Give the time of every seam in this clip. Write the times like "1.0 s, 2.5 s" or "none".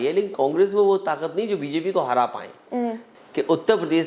3.0 s